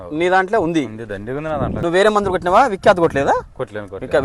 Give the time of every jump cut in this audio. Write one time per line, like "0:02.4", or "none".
0:01.7